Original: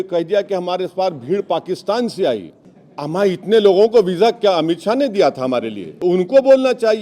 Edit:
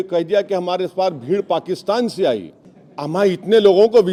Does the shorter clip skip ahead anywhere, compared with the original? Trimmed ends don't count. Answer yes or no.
no